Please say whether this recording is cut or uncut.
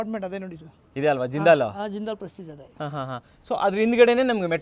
uncut